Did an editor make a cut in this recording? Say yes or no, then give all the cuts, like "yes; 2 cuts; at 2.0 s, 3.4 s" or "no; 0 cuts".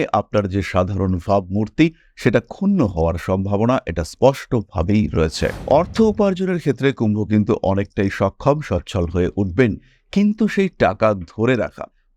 yes; 1 cut; at 5.6 s